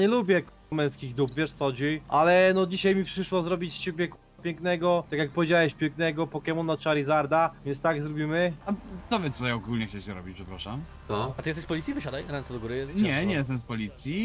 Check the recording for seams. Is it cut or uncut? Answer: cut